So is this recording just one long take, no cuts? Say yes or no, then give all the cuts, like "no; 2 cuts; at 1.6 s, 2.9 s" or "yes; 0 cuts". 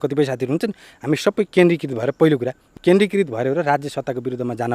no; 1 cut; at 2.7 s